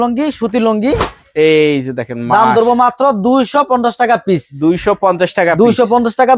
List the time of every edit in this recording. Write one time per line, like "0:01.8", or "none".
none